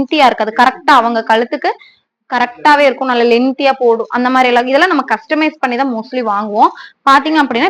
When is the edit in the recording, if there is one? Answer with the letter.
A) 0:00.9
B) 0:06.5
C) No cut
C